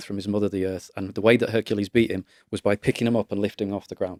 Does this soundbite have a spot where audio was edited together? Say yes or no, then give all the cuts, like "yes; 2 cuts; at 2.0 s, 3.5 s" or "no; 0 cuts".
no; 0 cuts